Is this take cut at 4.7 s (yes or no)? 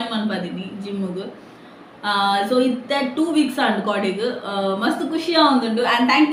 no